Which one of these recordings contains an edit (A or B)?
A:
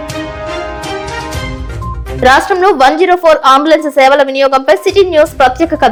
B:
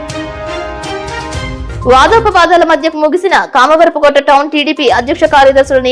B